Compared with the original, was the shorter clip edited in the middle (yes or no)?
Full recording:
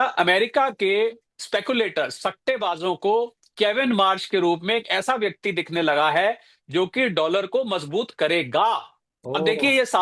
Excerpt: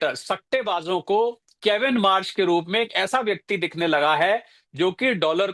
no